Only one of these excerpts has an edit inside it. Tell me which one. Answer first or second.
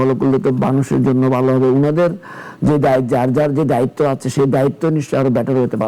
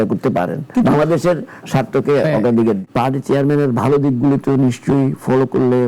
second